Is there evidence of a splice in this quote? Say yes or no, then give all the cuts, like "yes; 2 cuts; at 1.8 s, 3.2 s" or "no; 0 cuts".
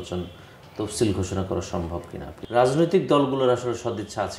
yes; 1 cut; at 2.3 s